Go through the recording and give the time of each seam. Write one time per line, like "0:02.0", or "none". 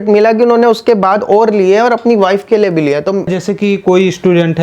0:03.3